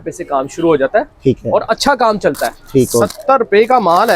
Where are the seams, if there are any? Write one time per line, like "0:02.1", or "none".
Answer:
0:03.0